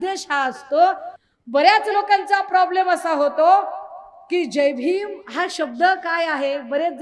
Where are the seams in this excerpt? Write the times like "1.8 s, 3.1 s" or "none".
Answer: 1.1 s